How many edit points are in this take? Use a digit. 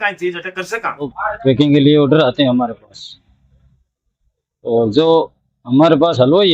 1